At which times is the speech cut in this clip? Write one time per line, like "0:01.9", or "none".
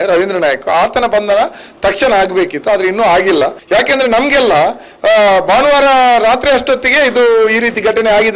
0:03.6